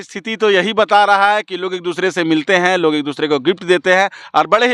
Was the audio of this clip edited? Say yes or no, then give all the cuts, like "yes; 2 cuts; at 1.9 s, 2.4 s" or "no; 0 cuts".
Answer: no; 0 cuts